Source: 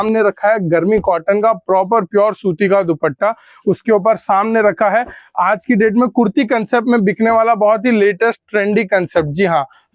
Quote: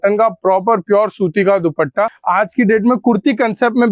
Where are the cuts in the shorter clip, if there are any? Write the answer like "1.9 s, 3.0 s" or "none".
2.2 s